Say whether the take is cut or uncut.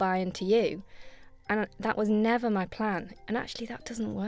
cut